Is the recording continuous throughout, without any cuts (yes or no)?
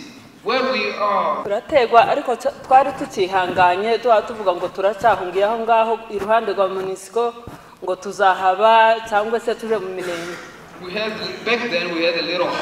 no